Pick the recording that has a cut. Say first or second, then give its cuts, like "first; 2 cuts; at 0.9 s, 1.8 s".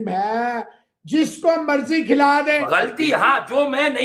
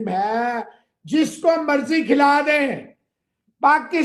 first; 1 cut; at 2.6 s